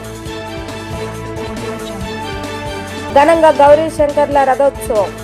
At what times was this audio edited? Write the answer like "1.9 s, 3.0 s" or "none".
0.9 s, 3.1 s